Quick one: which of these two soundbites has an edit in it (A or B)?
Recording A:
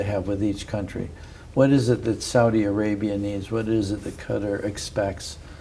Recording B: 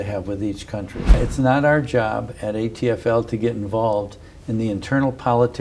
B